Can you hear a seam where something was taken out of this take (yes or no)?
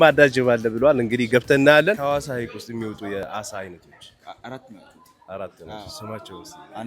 yes